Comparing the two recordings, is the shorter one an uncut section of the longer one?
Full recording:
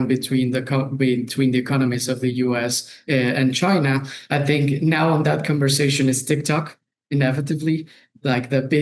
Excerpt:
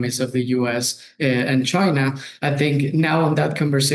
yes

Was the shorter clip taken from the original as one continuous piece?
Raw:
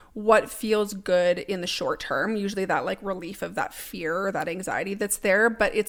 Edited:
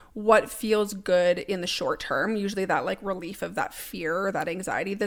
yes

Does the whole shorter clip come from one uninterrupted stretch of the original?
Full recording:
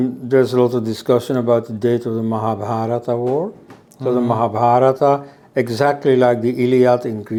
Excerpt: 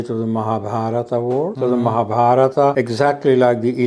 no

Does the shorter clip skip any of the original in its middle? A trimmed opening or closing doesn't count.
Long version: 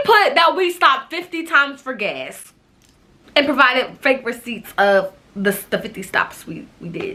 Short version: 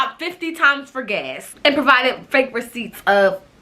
yes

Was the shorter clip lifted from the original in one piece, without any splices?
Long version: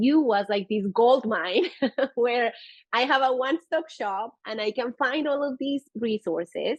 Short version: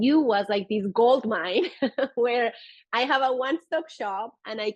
yes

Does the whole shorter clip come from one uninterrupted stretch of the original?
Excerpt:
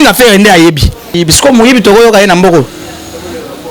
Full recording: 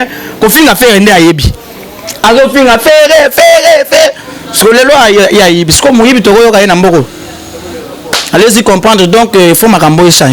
no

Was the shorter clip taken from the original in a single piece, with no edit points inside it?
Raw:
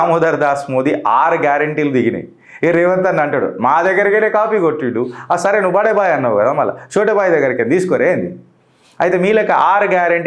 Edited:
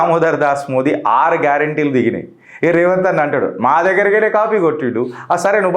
yes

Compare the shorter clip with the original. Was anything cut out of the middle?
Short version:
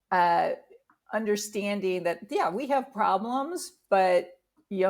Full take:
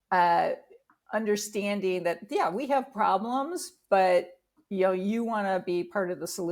no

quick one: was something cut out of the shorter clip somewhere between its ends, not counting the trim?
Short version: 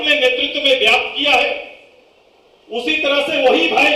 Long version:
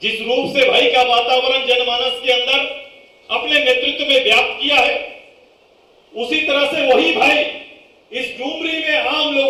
no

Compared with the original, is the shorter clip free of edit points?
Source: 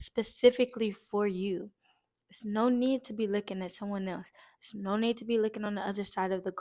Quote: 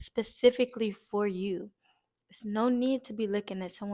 yes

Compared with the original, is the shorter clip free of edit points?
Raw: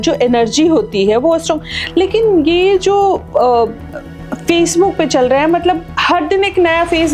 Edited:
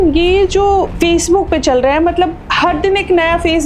no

